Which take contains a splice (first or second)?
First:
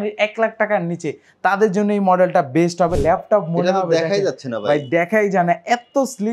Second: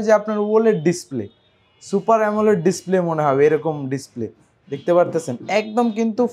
first